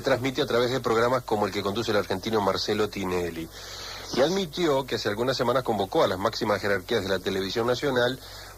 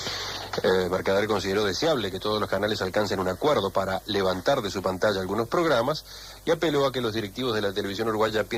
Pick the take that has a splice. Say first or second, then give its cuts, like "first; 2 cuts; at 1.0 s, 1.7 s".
first; 1 cut; at 2.4 s